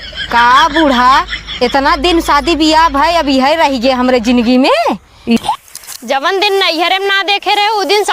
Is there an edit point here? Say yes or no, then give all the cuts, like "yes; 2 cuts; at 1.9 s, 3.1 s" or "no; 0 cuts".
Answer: yes; 1 cut; at 5.4 s